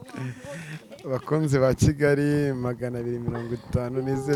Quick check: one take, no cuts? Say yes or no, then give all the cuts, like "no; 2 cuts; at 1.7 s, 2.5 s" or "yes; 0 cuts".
yes; 0 cuts